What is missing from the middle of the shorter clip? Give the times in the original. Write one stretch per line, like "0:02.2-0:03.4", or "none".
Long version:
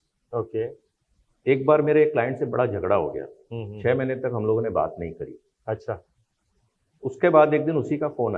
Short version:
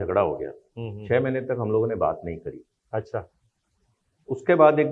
none